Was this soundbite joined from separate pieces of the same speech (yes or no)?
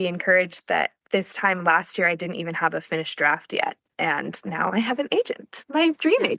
no